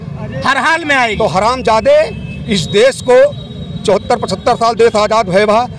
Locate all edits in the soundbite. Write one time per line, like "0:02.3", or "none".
0:01.1

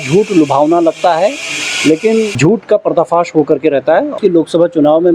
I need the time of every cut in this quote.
0:02.3
0:04.1

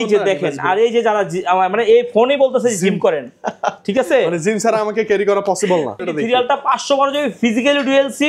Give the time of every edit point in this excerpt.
0:06.0

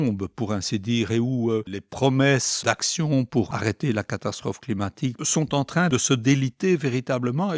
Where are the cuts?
0:01.8
0:02.6
0:03.5
0:05.2
0:05.9

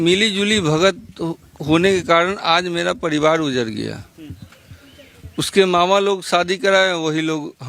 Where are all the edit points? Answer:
none

